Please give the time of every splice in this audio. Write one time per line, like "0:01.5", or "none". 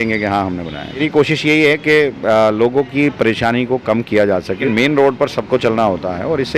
0:01.0
0:04.6